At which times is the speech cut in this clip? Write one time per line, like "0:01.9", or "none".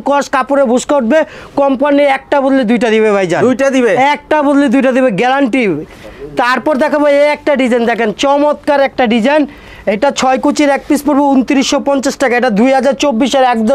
none